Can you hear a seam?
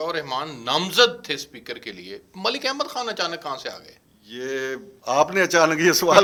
no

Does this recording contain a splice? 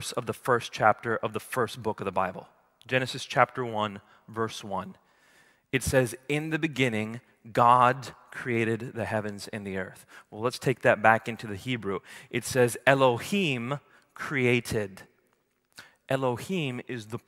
no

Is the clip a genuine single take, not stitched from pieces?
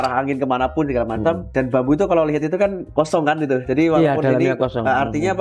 no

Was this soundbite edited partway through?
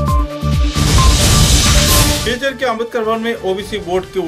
no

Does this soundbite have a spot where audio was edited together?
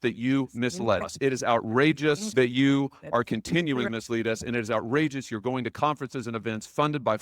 yes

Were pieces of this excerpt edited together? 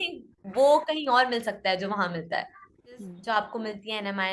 yes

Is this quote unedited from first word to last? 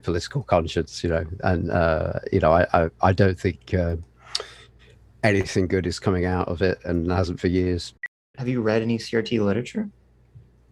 no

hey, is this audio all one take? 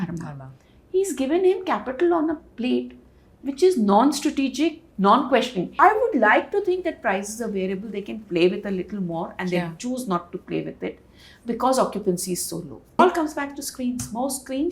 no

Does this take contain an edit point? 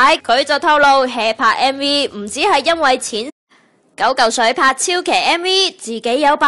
no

